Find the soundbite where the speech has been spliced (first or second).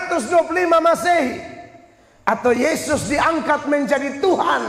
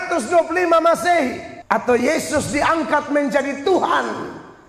second